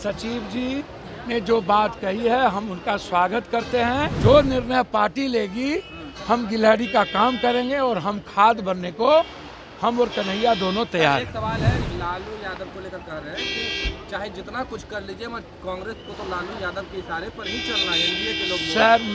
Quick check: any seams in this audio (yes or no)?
yes